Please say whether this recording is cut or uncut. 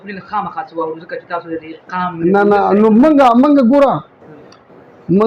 uncut